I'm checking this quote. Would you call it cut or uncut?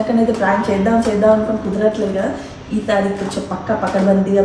uncut